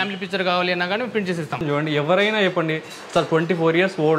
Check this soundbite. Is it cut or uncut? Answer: cut